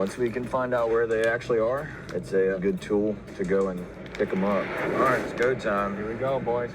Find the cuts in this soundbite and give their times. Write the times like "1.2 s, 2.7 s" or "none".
2.6 s, 4.8 s